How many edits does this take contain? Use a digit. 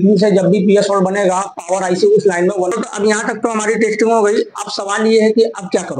1